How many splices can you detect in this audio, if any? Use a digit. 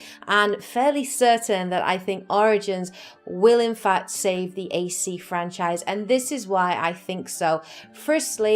1